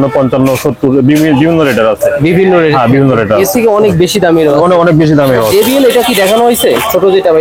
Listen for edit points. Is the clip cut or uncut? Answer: uncut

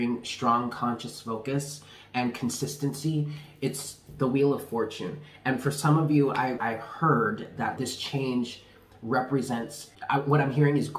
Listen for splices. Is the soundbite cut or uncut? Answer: cut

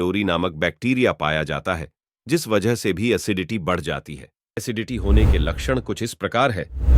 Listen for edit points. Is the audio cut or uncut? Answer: cut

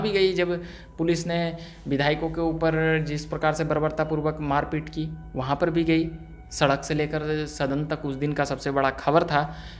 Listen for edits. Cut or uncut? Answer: uncut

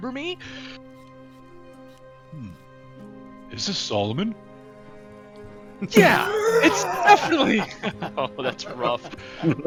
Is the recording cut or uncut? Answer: uncut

